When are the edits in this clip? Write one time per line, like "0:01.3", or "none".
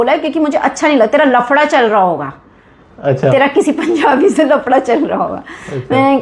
none